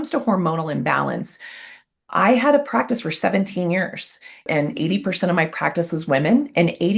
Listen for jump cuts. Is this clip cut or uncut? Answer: cut